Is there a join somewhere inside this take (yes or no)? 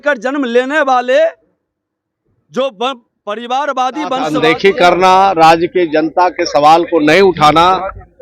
yes